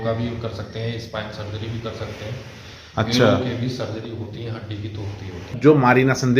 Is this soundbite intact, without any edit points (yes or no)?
no